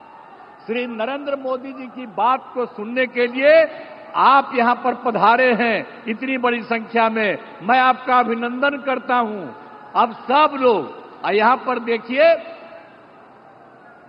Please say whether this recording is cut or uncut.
uncut